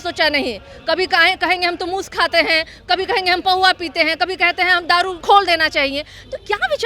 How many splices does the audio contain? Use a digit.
1